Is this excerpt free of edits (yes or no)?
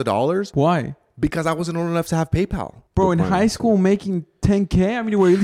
no